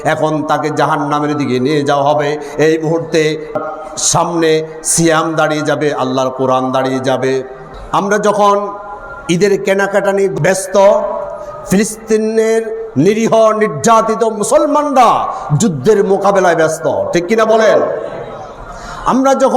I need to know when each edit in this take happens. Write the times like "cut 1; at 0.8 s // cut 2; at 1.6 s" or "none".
cut 1; at 7.7 s // cut 2; at 10.4 s